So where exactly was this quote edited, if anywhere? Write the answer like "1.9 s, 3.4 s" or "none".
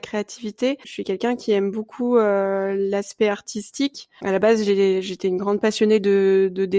0.9 s, 4.1 s

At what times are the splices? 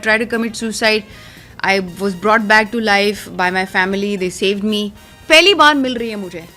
5.1 s

